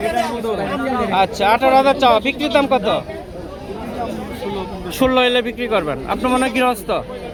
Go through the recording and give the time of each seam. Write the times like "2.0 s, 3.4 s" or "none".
none